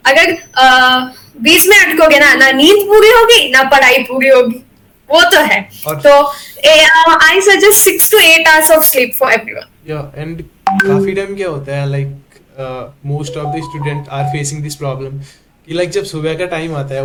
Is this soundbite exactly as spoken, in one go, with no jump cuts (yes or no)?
yes